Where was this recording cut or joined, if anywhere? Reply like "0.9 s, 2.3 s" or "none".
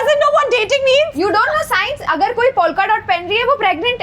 none